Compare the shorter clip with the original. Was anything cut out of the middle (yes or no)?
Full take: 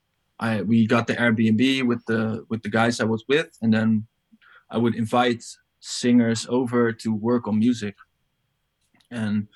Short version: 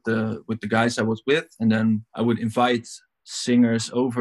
yes